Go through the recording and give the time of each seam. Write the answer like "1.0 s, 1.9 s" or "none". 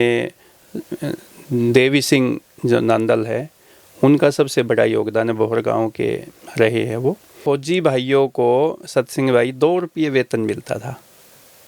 7.3 s